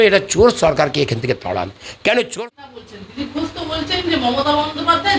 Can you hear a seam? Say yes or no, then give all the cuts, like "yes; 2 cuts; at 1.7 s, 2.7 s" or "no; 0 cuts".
yes; 1 cut; at 2.3 s